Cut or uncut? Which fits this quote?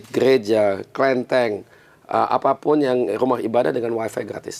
uncut